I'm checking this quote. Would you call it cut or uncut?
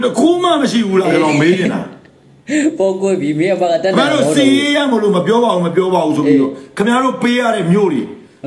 uncut